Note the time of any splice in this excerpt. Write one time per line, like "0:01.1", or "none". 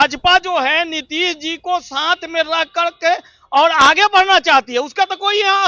none